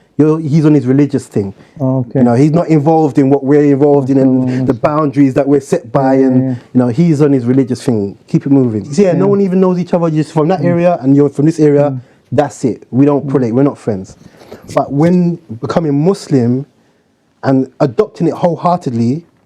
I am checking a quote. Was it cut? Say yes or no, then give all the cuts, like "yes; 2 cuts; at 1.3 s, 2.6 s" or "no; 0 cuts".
yes; 1 cut; at 8.9 s